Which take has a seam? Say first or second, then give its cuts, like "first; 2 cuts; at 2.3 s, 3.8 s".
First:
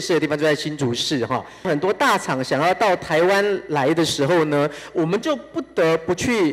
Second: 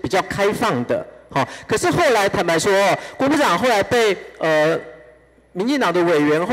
first; 1 cut; at 1.7 s